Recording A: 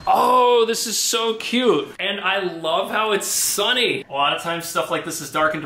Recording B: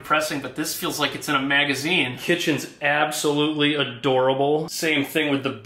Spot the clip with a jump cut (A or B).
A